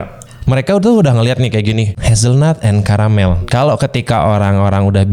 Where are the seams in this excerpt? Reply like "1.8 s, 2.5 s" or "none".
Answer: 2.0 s, 3.4 s